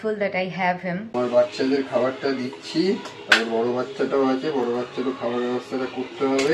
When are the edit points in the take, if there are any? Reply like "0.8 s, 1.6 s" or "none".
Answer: 1.1 s